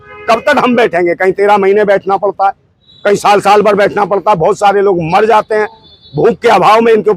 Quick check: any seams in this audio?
no; 0 cuts

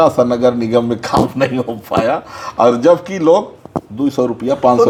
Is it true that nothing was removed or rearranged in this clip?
yes; 0 cuts

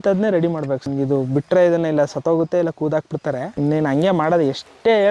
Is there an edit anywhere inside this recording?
yes; 2 cuts; at 0.9 s, 3.5 s

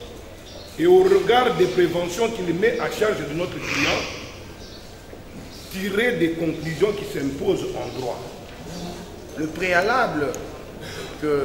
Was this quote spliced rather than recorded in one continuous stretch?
yes; 1 cut; at 9.2 s

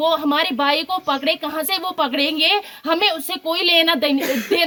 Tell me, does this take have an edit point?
no; 0 cuts

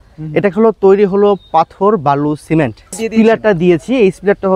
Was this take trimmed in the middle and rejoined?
yes; 1 cut; at 3.0 s

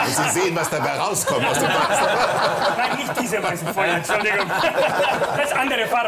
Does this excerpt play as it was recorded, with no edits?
yes; 0 cuts

